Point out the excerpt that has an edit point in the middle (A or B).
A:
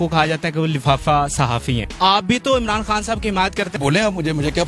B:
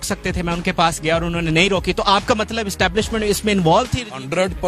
A